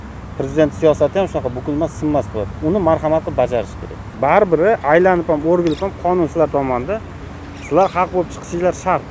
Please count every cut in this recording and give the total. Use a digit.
0